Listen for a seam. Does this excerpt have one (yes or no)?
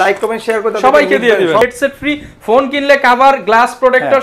yes